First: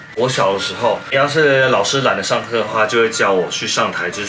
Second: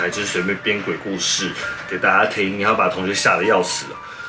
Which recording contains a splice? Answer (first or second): first